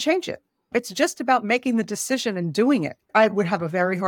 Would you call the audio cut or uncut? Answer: cut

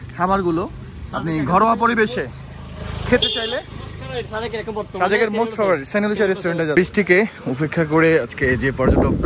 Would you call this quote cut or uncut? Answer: cut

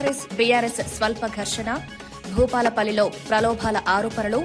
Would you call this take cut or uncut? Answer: uncut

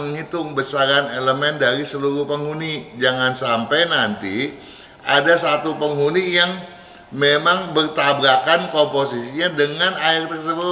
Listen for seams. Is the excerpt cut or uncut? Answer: uncut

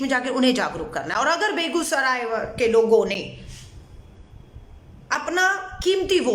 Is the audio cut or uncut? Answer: uncut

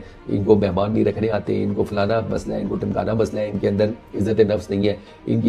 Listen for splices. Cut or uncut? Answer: uncut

